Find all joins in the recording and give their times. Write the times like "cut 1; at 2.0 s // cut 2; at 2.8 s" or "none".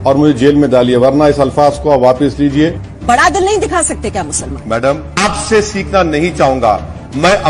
cut 1; at 2.8 s // cut 2; at 5.1 s